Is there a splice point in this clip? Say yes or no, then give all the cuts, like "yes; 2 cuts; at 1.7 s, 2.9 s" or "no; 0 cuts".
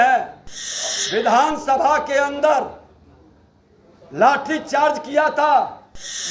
no; 0 cuts